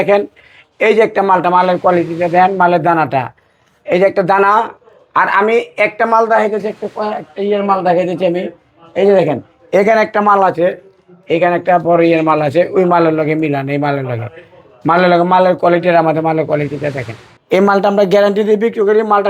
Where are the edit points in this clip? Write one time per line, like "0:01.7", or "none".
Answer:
none